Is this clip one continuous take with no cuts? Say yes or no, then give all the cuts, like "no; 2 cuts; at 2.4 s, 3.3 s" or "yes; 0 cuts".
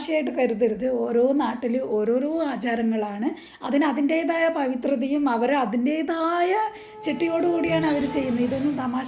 yes; 0 cuts